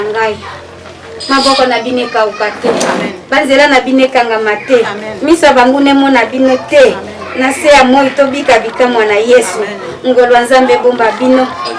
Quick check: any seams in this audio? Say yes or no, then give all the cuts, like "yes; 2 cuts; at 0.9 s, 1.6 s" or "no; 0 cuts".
no; 0 cuts